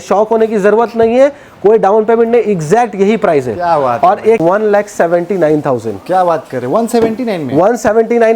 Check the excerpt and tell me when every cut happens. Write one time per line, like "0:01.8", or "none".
0:04.4